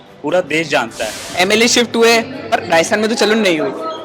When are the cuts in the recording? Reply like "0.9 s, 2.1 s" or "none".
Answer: 1.2 s